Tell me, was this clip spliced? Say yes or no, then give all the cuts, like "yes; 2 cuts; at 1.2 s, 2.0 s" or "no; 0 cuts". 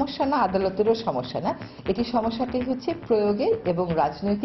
no; 0 cuts